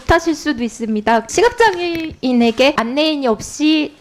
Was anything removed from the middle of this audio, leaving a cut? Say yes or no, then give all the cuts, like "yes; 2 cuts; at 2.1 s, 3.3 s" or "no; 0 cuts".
yes; 2 cuts; at 1.3 s, 2.8 s